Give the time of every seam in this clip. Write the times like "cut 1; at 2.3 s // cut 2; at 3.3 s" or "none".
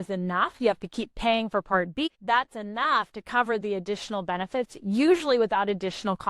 cut 1; at 2.1 s